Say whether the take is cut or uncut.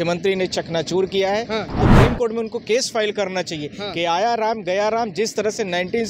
cut